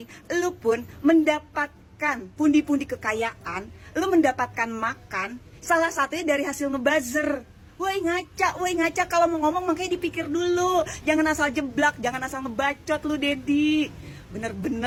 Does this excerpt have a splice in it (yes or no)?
no